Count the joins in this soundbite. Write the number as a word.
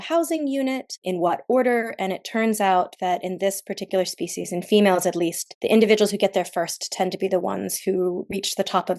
two